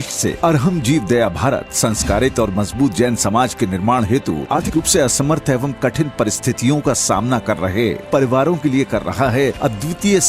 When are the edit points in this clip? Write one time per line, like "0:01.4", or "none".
0:04.6